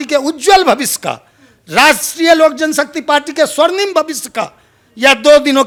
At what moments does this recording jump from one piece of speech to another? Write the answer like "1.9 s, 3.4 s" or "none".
none